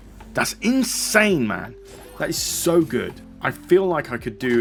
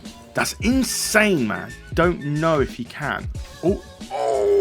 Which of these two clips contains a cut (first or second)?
second